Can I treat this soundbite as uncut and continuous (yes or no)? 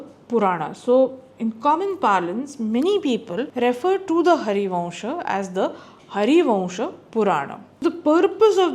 no